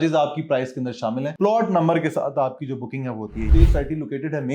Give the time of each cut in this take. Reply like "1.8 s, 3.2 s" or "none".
3.5 s